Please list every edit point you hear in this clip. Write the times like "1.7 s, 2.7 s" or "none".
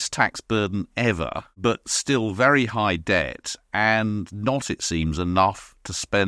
1.5 s